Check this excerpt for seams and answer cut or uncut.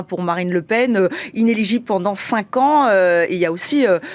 uncut